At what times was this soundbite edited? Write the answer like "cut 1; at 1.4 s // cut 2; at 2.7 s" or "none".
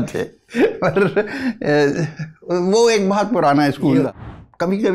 cut 1; at 3.9 s